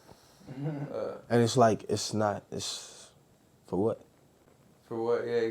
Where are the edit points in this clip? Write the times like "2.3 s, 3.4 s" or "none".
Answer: none